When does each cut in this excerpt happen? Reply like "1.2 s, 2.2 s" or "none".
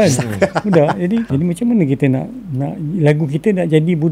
1.3 s